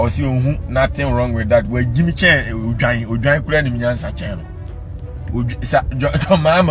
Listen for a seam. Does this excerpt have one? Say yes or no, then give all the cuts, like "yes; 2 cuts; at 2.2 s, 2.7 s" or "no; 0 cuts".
no; 0 cuts